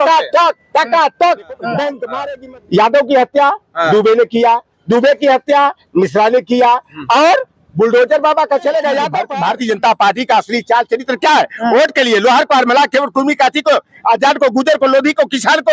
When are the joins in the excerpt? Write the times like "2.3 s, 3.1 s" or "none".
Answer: 2.1 s, 9.2 s